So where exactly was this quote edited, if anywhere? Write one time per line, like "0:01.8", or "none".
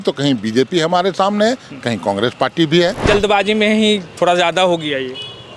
0:03.1